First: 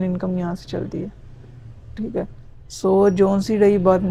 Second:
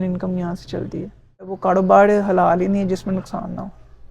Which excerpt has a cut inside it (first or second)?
second